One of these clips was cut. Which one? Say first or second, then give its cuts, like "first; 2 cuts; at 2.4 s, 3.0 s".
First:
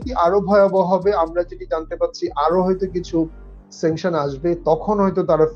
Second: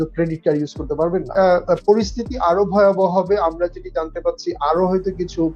second; 1 cut; at 1.3 s